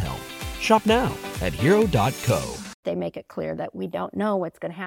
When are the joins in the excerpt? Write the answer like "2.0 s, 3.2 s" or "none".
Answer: 2.8 s